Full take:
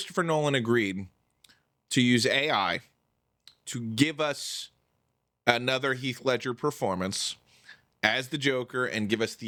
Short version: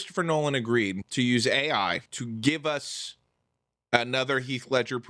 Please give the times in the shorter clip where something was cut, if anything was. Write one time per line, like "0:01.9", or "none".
0:01.0
0:02.1